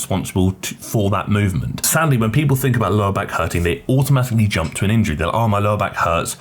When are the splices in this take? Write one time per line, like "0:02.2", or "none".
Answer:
0:01.8